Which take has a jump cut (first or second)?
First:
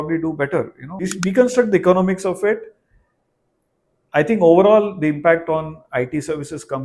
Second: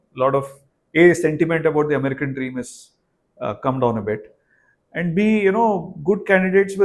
first